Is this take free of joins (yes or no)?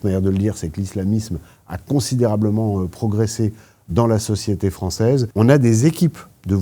no